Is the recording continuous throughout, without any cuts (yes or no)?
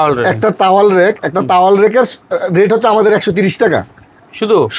yes